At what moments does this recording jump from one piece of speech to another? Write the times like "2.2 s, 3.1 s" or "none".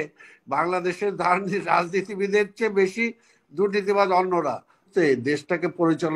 4.9 s